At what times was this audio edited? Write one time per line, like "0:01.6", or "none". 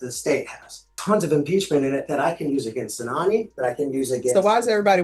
0:01.0

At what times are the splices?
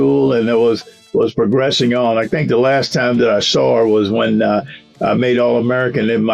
none

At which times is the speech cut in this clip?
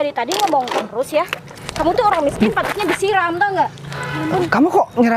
none

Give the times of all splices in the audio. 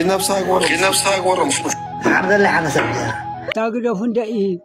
0:03.5

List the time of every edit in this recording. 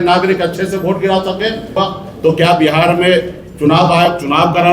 0:01.7

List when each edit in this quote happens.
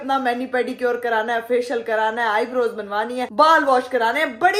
none

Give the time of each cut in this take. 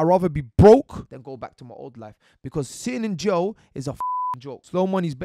0:01.1
0:04.0

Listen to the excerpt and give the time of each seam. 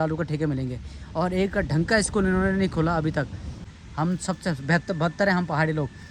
0:03.5

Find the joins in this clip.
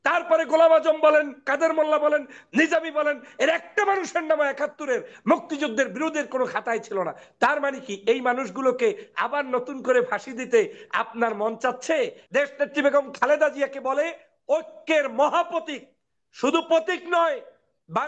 0:12.2

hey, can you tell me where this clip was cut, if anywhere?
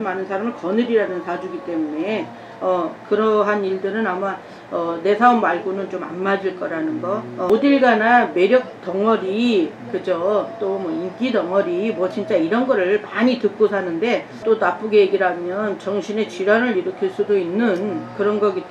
0:07.3
0:14.4

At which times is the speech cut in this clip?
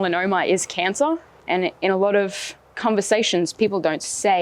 0:01.4

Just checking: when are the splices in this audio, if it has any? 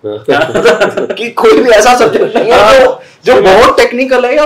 none

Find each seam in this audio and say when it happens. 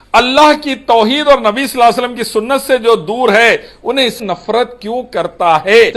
0:04.2

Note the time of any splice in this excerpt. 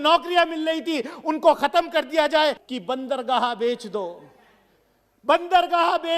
0:02.6

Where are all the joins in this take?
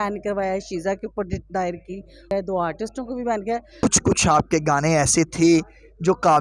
0:02.3
0:03.8

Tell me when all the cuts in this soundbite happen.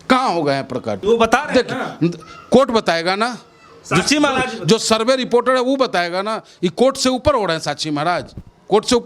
0:01.0

